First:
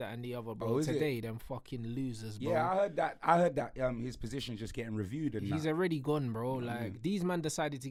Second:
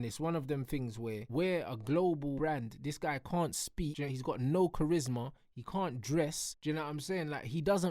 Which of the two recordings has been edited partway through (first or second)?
second